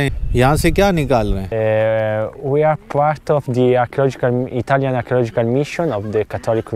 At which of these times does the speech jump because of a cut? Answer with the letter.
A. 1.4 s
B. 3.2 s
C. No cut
A